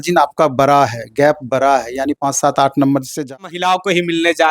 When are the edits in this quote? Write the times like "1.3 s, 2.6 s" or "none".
3.3 s